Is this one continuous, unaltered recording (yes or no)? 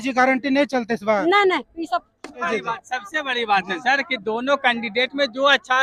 yes